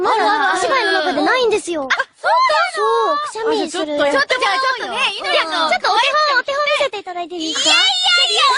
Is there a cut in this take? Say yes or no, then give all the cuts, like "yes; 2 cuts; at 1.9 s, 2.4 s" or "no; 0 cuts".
yes; 1 cut; at 5.3 s